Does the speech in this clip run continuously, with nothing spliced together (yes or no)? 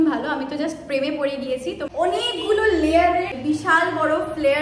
no